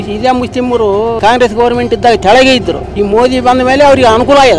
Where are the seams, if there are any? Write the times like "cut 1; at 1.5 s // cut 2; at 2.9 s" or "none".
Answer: cut 1; at 1.2 s // cut 2; at 2.8 s